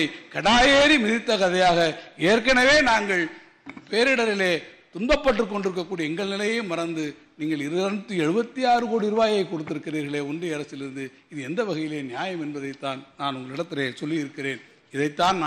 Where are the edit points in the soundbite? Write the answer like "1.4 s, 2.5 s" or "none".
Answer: none